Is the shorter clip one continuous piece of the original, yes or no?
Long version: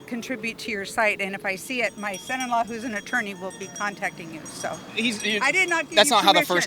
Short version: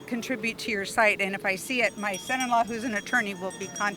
yes